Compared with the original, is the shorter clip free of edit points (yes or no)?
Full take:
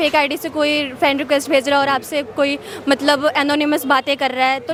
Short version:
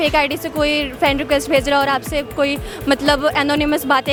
yes